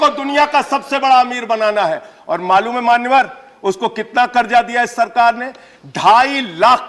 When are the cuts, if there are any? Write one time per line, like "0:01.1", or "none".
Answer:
none